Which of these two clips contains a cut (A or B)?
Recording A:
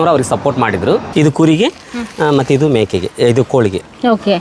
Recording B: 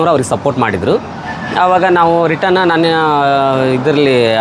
A